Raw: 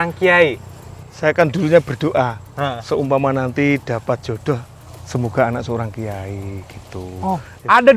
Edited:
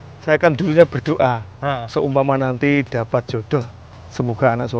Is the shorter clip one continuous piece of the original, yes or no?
yes